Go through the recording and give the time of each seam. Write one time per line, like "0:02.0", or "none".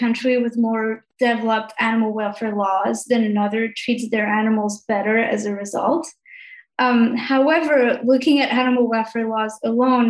none